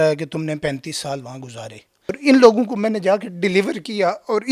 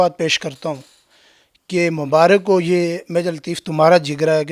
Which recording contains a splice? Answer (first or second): first